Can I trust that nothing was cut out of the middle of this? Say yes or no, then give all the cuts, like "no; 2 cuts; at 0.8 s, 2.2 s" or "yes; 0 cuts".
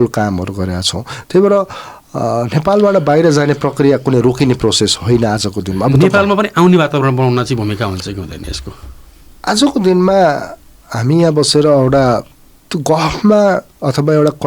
yes; 0 cuts